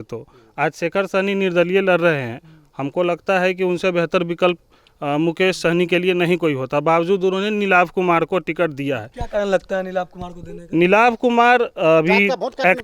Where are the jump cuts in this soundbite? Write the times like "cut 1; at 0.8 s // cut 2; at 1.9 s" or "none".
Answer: none